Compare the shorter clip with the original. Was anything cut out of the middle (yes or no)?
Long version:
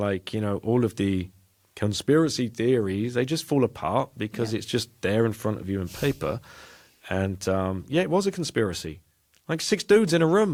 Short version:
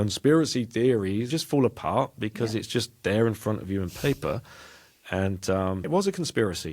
yes